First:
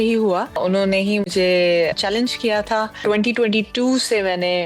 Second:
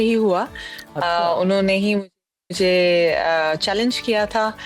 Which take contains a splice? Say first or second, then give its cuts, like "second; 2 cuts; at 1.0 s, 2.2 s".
first; 3 cuts; at 0.9 s, 2.0 s, 3.0 s